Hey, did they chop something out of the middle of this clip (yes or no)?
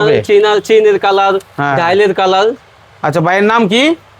no